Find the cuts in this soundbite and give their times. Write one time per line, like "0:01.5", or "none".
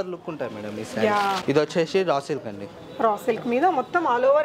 0:01.4